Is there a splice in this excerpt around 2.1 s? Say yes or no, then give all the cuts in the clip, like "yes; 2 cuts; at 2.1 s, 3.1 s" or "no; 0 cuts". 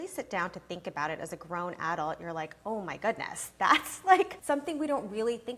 no; 1 cut; at 4.4 s